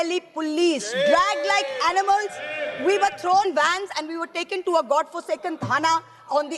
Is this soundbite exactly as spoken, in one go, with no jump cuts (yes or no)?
yes